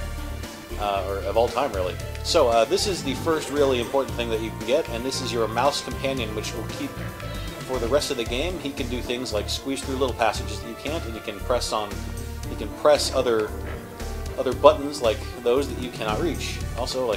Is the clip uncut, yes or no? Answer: yes